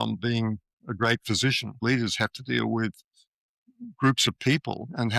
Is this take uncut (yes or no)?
no